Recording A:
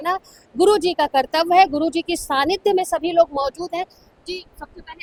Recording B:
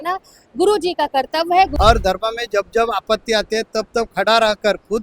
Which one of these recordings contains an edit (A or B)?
B